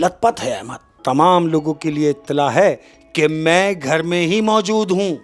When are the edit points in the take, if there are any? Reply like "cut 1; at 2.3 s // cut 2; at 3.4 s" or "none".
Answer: cut 1; at 0.9 s